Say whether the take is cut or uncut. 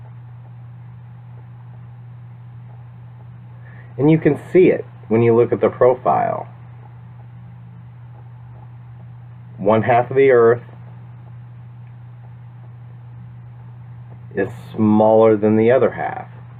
cut